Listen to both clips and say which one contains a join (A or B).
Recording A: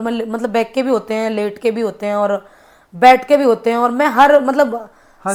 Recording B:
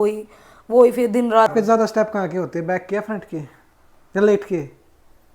B